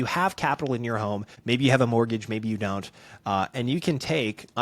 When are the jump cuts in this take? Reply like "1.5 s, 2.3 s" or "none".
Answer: 1.3 s